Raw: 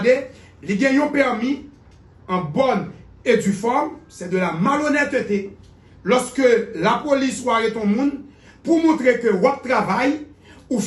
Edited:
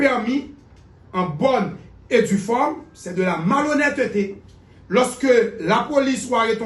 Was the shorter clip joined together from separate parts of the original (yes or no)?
no